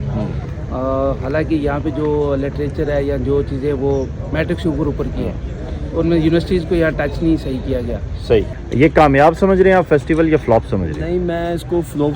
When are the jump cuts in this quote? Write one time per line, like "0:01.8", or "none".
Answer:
0:08.6